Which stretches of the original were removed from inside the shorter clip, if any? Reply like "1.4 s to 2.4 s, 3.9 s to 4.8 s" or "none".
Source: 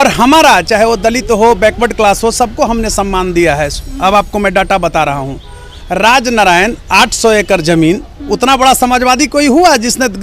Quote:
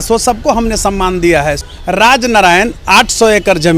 3.8 s to 5.7 s